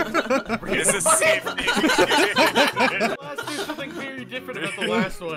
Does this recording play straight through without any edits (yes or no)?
no